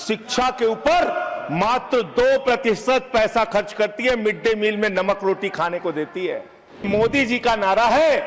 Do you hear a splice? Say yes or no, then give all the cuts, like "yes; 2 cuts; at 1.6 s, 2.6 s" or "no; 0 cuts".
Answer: yes; 1 cut; at 6.9 s